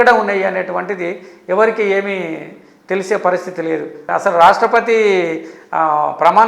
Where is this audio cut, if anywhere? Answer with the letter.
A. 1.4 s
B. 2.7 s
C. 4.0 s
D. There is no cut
C